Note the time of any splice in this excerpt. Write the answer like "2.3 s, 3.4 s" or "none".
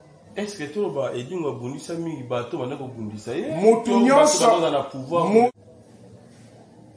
5.5 s